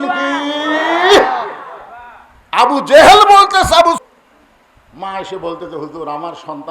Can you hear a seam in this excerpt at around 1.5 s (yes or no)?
no